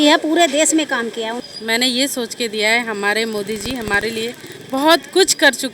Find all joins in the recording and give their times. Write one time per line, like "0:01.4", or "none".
0:01.4